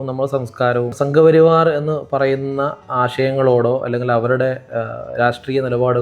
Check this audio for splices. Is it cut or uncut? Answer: cut